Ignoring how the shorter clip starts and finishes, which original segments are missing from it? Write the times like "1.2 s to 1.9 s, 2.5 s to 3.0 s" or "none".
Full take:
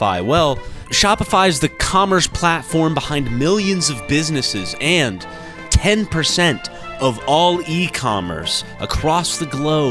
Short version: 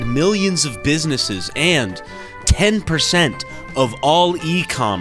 none